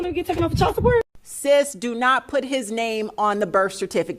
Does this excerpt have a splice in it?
yes; 1 cut; at 1.2 s

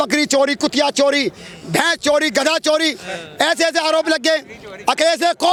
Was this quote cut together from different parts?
no; 0 cuts

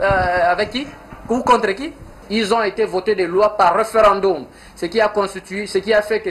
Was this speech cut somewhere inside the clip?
yes; 1 cut; at 2.2 s

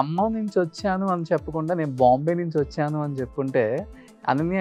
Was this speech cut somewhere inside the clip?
no; 0 cuts

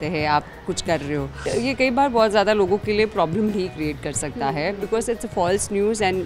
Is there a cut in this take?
yes; 1 cut; at 1.4 s

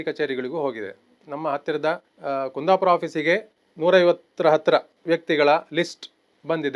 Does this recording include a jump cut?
no; 0 cuts

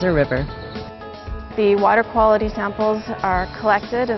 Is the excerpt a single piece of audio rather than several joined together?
no; 1 cut; at 1.1 s

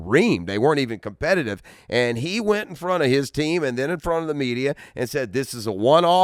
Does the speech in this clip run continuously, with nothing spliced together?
yes; 0 cuts

